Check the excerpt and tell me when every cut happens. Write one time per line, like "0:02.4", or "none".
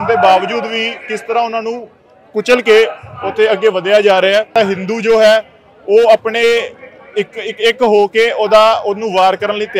0:04.5